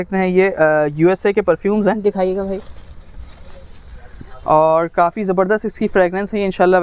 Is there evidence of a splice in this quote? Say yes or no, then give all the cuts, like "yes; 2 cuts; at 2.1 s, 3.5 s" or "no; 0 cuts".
no; 0 cuts